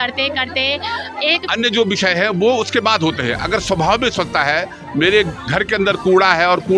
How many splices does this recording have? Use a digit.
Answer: 1